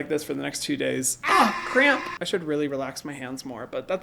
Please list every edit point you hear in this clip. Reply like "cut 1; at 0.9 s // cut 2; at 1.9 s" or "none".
cut 1; at 1.2 s